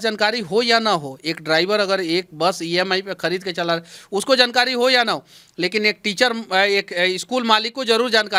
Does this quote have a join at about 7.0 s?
no; 0 cuts

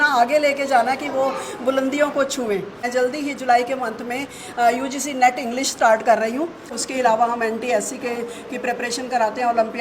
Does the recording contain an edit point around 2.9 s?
yes; 2 cuts; at 2.9 s, 6.8 s

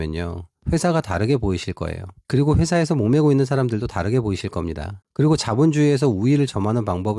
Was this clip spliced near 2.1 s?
no; 1 cut; at 5.0 s

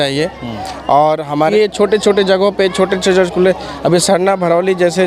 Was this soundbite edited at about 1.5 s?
yes; 1 cut; at 1.5 s

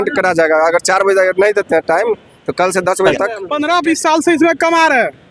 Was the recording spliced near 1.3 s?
no; 1 cut; at 3.5 s

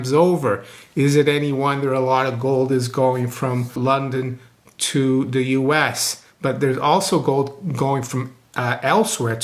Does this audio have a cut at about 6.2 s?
no; 1 cut; at 3.8 s

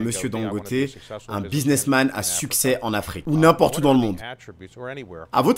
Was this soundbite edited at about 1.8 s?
no; 1 cut; at 3.1 s

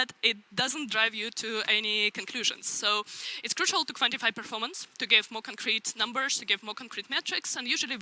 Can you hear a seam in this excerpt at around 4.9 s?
no; 0 cuts

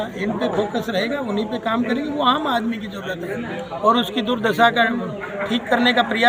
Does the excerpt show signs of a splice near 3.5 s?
no; 0 cuts

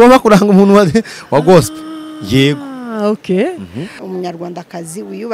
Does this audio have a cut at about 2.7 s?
no; 1 cut; at 4.0 s

